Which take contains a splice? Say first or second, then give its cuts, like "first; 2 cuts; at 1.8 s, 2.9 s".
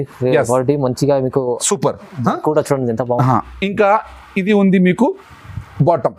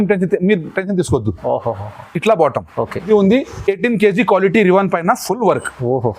second; 1 cut; at 3.1 s